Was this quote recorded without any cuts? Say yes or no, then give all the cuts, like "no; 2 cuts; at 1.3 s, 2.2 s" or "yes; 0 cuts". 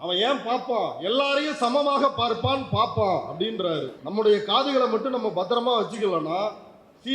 no; 1 cut; at 4.0 s